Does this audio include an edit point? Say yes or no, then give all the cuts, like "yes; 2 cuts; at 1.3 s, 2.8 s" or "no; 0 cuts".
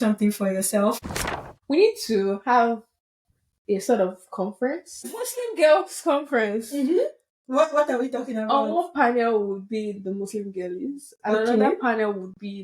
yes; 2 cuts; at 1.0 s, 5.2 s